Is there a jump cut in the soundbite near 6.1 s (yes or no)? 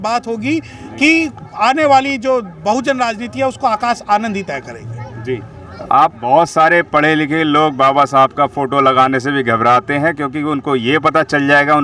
yes